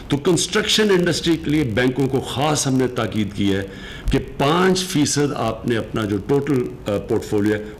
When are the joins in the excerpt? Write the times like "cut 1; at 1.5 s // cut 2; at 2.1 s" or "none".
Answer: none